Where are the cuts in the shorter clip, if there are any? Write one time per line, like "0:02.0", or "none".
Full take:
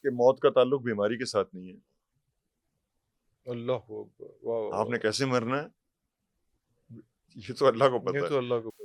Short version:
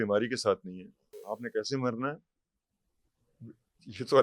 0:01.2